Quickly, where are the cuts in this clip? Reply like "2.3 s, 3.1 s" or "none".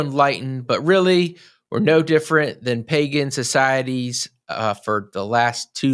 none